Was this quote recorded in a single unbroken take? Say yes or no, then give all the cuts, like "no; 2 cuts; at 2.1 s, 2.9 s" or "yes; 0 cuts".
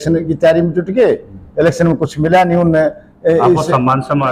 yes; 0 cuts